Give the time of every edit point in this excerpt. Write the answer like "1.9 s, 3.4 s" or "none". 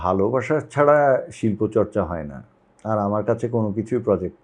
none